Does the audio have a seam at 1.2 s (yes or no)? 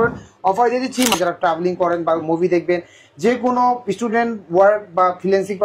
yes